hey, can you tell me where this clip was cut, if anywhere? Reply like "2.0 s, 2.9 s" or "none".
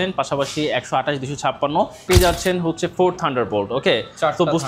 2.1 s